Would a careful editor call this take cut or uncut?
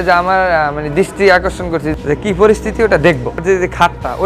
cut